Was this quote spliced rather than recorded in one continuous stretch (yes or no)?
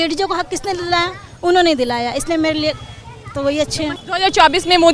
yes